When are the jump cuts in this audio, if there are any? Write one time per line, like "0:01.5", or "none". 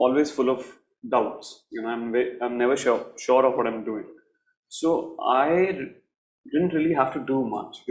none